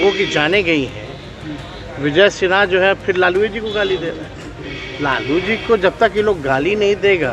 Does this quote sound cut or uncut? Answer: uncut